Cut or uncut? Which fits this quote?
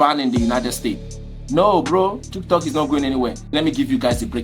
cut